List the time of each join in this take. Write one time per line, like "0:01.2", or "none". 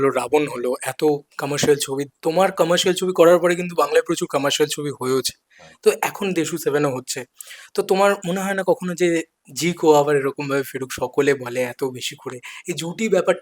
none